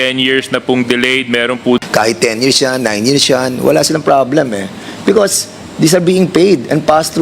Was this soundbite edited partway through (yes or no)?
yes